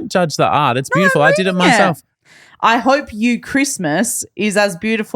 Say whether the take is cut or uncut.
cut